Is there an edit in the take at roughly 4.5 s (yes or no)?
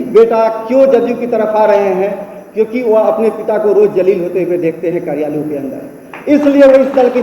no